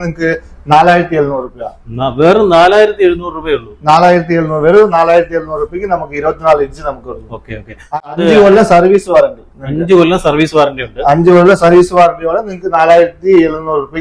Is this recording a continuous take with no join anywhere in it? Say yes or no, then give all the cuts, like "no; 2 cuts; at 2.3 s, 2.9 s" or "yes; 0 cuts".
yes; 0 cuts